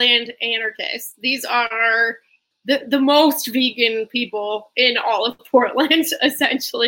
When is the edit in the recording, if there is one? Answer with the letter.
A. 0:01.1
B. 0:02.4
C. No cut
B